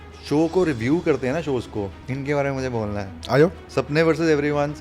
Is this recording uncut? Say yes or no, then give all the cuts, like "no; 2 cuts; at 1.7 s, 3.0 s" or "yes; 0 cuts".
no; 2 cuts; at 2.0 s, 3.6 s